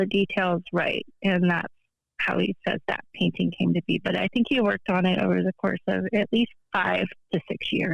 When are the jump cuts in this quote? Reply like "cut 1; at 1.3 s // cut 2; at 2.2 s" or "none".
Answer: cut 1; at 6.6 s